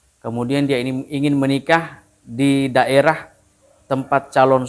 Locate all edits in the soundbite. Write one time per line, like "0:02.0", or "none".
none